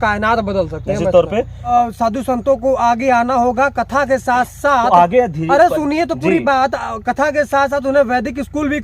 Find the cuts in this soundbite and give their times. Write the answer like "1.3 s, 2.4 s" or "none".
1.7 s